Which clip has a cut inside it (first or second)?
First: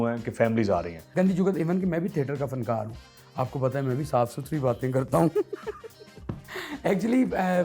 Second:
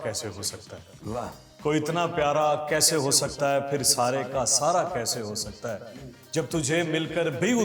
first